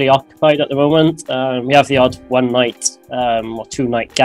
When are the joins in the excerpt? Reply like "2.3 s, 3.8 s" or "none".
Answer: none